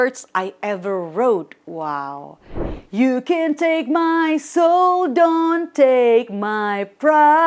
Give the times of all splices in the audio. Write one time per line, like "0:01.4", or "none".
0:02.7